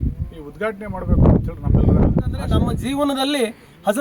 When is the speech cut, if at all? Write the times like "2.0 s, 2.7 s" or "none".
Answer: 2.7 s